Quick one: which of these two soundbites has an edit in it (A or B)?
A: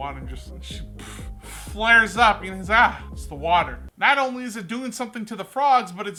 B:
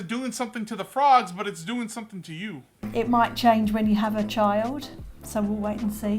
B